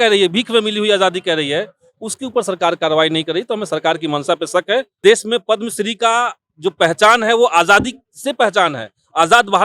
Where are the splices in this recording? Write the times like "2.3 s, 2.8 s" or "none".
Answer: 4.9 s

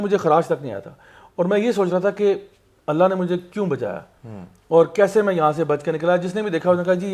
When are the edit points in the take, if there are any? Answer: none

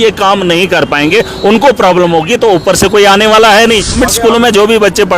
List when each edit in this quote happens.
4.0 s

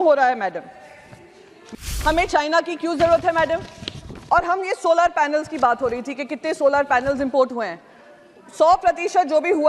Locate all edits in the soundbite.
1.9 s

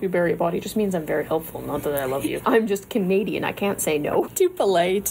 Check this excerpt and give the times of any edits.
2.4 s, 4.3 s

